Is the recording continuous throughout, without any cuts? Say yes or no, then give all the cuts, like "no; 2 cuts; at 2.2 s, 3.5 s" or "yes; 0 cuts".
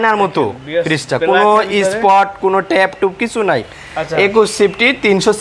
yes; 0 cuts